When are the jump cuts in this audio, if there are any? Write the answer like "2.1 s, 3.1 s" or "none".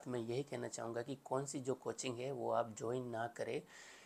none